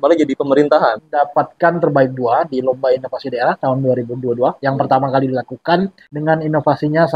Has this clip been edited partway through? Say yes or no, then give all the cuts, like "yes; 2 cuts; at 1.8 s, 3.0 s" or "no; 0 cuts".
yes; 2 cuts; at 1.0 s, 6.0 s